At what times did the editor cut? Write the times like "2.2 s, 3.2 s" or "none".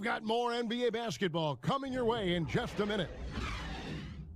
3.1 s